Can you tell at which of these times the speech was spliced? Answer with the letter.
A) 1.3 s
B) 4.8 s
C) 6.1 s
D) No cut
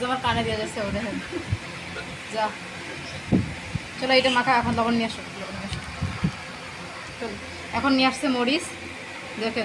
D